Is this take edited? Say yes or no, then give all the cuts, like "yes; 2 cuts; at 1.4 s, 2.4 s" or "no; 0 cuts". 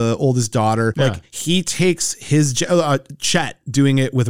no; 0 cuts